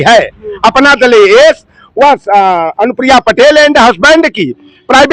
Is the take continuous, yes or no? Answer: yes